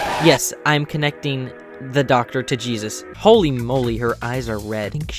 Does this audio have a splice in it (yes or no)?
yes